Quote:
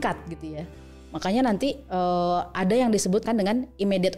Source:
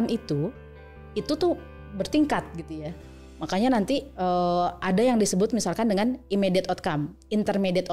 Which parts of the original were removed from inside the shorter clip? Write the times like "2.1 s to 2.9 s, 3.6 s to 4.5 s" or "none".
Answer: 5.5 s to 5.7 s